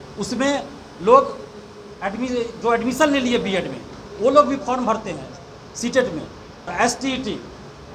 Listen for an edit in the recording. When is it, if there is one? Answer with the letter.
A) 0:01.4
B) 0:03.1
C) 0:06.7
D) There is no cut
C